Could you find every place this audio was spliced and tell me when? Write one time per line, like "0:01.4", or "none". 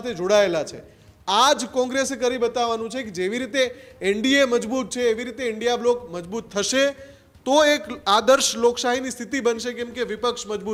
none